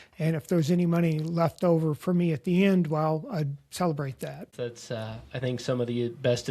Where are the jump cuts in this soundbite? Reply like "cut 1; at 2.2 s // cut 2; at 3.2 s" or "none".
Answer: cut 1; at 4.5 s